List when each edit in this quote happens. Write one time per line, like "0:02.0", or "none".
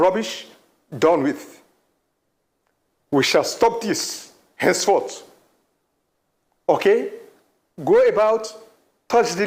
none